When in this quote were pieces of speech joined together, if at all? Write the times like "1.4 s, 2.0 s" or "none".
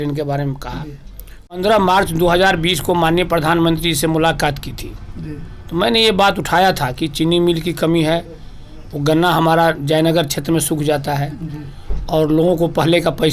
1.5 s